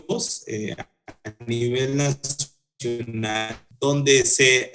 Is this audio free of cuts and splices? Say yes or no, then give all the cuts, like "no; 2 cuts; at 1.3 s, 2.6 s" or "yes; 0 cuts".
no; 1 cut; at 3.6 s